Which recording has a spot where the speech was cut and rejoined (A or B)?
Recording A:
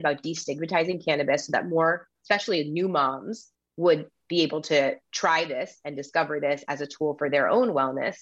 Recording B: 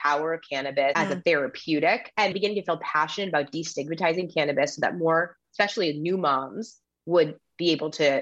B